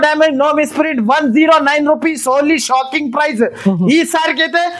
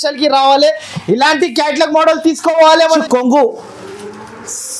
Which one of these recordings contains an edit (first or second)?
second